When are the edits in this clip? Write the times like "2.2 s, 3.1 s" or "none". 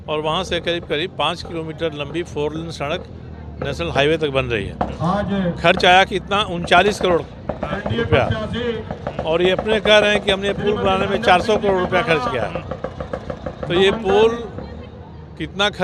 none